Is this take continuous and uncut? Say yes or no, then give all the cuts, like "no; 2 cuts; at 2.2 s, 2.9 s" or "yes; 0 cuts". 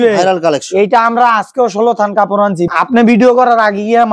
no; 1 cut; at 2.7 s